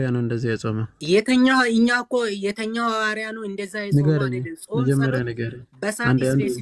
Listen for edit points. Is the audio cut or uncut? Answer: cut